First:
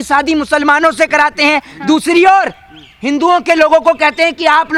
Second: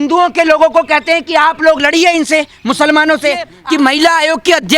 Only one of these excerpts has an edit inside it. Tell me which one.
second; 1 cut; at 3.5 s

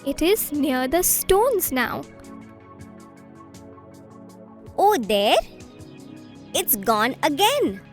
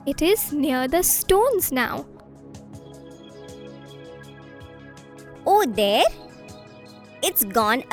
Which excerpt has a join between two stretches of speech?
first; 2 cuts; at 2.1 s, 4.0 s

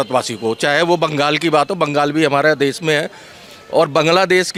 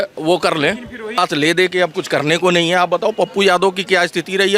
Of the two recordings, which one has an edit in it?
second; 1 cut; at 1.2 s

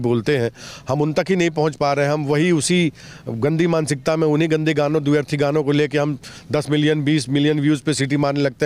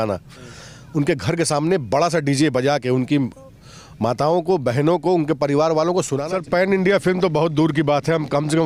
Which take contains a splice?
second; 1 cut; at 6.2 s

